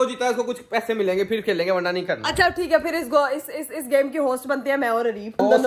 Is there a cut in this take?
no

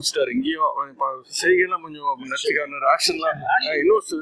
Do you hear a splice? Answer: no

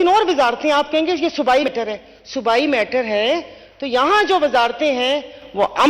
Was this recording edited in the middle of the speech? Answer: yes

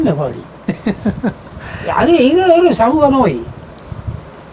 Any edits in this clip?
no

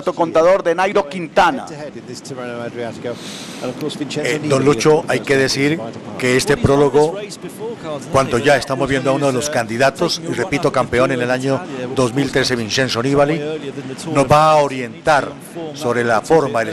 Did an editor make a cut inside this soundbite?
yes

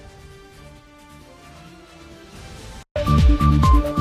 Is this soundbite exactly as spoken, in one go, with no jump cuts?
yes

